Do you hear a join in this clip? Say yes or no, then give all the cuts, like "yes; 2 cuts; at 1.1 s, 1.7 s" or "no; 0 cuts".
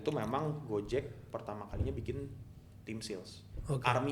no; 0 cuts